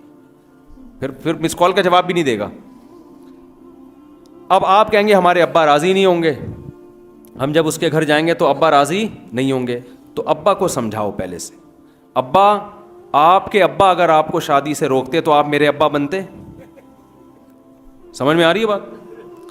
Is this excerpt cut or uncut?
uncut